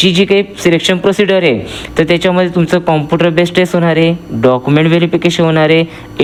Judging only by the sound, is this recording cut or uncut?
uncut